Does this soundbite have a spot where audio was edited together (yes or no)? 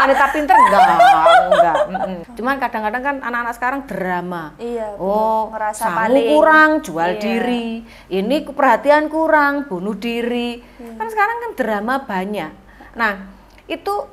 yes